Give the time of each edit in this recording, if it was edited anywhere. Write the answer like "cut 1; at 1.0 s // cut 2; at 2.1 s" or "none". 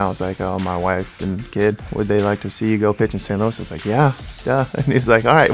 cut 1; at 1.9 s

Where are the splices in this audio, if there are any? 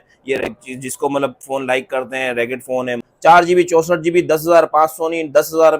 cut 1; at 3.1 s

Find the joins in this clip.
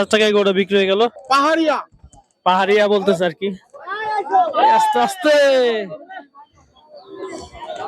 cut 1; at 1.2 s

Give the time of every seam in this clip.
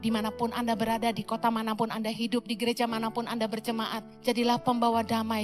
cut 1; at 4.1 s

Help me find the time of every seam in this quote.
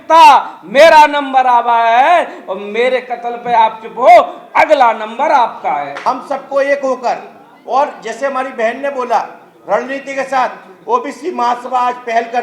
none

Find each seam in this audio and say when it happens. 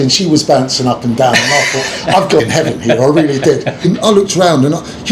cut 1; at 2.4 s // cut 2; at 3.8 s

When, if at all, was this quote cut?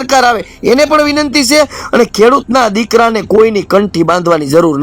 none

